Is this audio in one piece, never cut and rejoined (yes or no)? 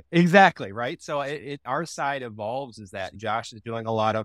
no